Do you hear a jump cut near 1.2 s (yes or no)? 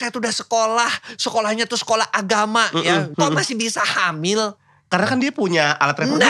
no